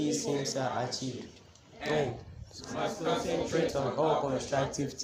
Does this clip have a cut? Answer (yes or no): no